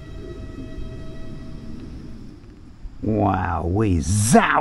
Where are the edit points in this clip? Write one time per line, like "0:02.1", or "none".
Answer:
0:02.5